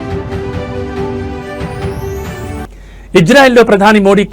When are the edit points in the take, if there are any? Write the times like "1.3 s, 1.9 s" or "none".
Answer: 2.6 s